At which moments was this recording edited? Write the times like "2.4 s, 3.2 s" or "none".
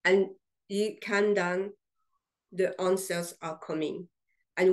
1.0 s